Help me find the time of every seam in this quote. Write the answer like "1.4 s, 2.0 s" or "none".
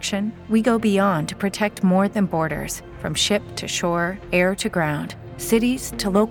none